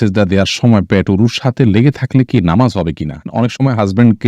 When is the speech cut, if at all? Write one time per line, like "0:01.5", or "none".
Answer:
0:03.3